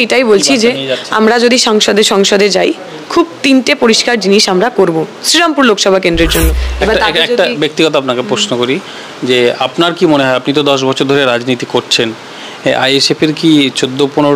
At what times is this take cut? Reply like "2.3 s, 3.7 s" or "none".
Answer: 6.6 s